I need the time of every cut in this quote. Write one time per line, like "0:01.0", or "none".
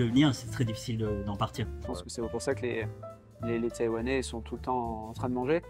0:01.8